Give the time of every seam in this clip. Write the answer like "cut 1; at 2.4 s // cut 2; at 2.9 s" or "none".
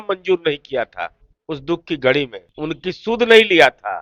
cut 1; at 2.4 s